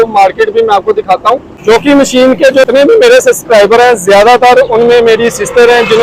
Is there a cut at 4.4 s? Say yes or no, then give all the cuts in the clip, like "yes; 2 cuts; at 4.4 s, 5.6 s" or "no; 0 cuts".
no; 2 cuts; at 1.4 s, 2.7 s